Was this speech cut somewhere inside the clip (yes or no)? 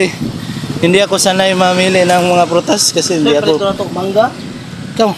no